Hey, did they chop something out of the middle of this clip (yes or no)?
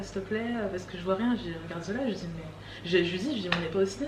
no